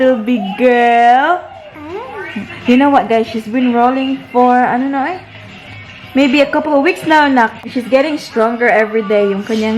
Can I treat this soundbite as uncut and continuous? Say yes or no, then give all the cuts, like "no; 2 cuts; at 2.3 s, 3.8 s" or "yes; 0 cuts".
no; 1 cut; at 7.6 s